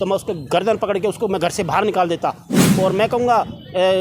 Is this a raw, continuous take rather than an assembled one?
no; 1 cut; at 2.6 s

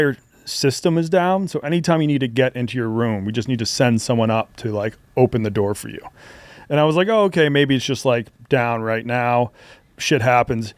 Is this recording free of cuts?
yes; 0 cuts

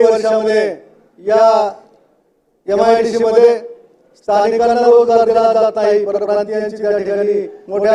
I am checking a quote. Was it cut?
no; 0 cuts

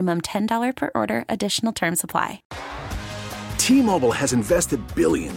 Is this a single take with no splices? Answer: no; 1 cut; at 2.4 s

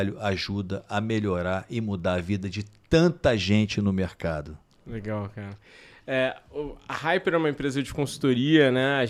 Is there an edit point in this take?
no; 0 cuts

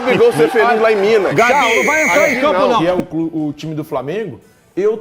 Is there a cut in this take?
yes; 1 cut; at 2.8 s

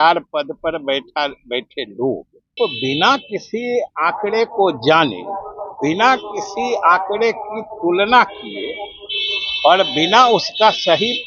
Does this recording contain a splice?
yes; 1 cut; at 2.5 s

